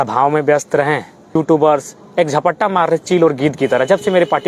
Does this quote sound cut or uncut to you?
cut